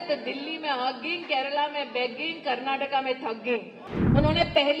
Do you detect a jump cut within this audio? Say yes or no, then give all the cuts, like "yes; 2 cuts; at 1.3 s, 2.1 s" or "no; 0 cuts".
yes; 1 cut; at 3.8 s